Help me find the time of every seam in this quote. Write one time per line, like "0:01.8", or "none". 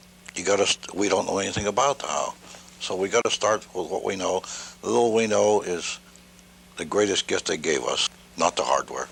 none